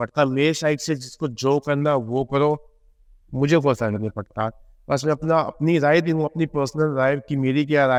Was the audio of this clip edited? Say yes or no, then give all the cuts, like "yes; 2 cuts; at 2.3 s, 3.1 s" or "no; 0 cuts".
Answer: no; 0 cuts